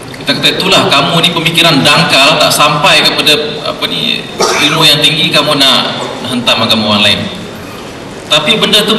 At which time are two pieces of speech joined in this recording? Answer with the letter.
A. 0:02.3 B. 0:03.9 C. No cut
C